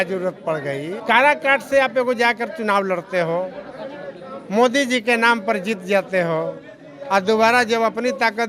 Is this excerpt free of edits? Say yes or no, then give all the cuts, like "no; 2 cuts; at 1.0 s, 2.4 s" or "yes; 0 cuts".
no; 1 cut; at 0.9 s